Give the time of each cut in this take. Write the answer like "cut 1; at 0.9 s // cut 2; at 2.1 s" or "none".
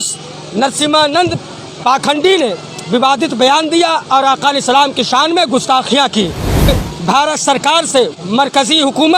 cut 1; at 6.7 s